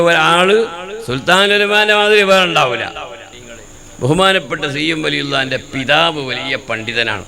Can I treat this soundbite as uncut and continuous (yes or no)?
no